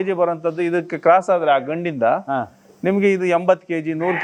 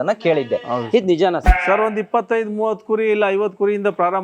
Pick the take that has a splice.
second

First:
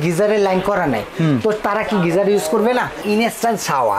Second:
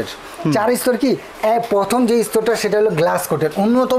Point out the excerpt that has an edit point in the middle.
first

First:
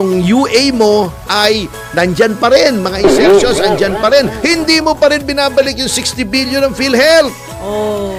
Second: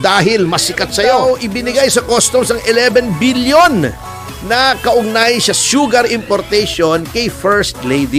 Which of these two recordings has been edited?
second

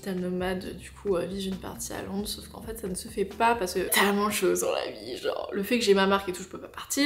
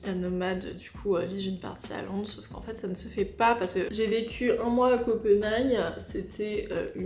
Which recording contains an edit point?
second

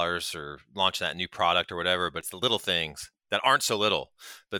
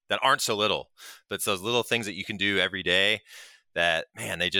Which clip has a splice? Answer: first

